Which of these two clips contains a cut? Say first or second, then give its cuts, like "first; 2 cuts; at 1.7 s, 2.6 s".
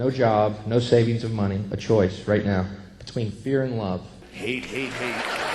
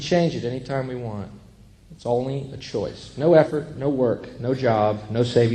first; 1 cut; at 4.2 s